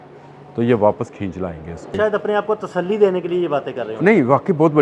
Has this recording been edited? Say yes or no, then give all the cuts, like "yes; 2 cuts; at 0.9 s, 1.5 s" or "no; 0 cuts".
yes; 1 cut; at 1.9 s